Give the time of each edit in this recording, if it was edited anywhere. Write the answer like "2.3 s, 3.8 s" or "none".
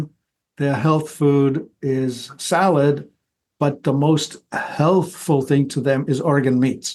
none